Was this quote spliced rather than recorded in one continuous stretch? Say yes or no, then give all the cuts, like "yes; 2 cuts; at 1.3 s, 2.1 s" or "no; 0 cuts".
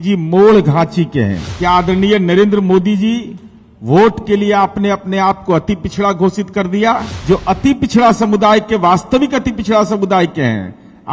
yes; 2 cuts; at 1.5 s, 7.1 s